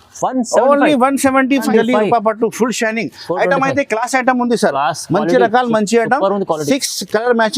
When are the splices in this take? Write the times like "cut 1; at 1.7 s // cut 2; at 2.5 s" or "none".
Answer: cut 1; at 1.7 s